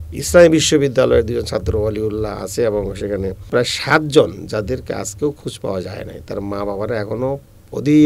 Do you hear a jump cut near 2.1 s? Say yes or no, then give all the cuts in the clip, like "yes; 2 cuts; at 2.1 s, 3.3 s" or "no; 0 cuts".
no; 1 cut; at 3.5 s